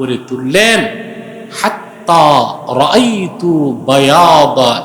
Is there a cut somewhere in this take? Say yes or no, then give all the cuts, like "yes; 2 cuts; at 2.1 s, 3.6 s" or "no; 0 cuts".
no; 0 cuts